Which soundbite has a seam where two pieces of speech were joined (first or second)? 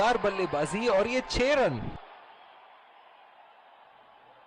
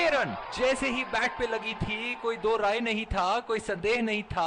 first